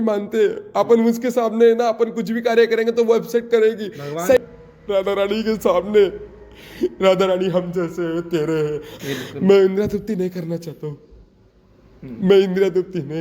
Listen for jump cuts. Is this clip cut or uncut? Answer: cut